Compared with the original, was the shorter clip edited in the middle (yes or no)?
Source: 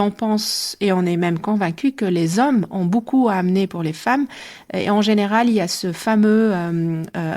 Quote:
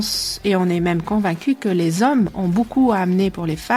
no